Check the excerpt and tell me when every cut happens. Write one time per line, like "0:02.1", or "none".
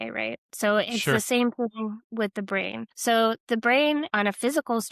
0:02.9
0:04.1